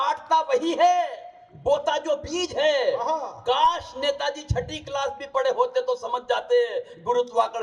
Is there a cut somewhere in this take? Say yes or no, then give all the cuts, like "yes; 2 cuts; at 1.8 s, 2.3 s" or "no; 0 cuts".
no; 0 cuts